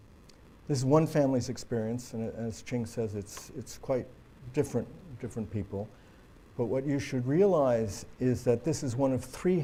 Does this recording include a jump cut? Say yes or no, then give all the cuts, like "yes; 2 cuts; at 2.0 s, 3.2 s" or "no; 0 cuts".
no; 0 cuts